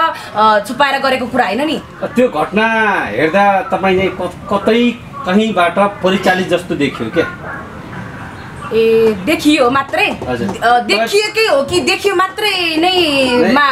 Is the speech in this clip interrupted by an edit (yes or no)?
yes